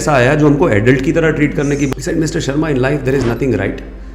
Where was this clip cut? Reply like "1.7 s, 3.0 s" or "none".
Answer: 1.9 s